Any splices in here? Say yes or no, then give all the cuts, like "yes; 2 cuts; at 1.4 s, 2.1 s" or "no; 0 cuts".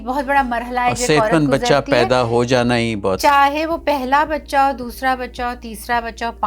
yes; 1 cut; at 3.2 s